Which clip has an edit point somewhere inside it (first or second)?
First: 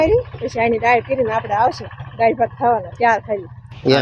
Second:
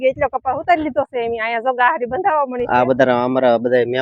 second